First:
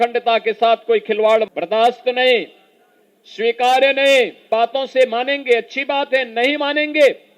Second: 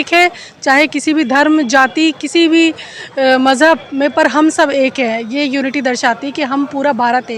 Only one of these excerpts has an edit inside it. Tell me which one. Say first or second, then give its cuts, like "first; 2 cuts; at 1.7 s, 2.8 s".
first; 2 cuts; at 1.6 s, 4.5 s